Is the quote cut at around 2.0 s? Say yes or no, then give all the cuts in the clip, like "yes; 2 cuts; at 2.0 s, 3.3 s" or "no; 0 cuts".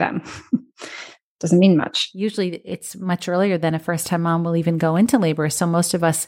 yes; 1 cut; at 2.0 s